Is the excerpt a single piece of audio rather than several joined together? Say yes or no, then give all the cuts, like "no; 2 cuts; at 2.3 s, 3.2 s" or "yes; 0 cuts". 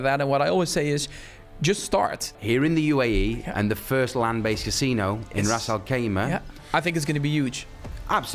no; 2 cuts; at 2.3 s, 6.6 s